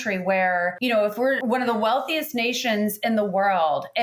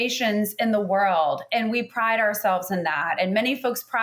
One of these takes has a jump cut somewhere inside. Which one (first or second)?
first